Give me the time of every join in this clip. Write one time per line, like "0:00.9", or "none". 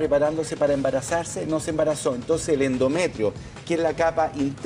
0:01.1